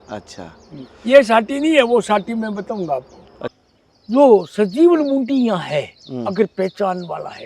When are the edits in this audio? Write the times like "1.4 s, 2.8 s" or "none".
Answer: 3.5 s